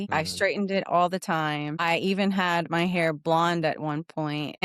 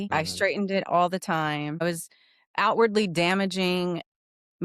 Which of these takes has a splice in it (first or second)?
second